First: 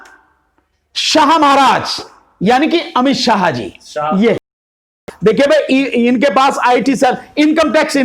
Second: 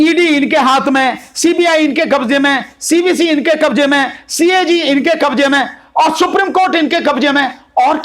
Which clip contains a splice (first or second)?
first